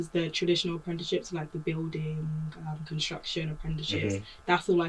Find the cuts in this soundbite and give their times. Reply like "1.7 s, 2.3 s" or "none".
none